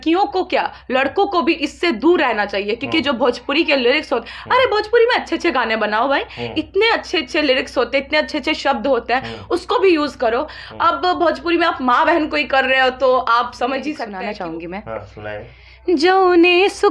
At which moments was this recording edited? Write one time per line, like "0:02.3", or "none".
0:14.1